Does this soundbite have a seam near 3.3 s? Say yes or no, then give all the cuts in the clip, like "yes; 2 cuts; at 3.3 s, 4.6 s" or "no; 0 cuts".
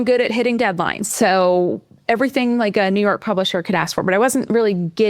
no; 1 cut; at 1.0 s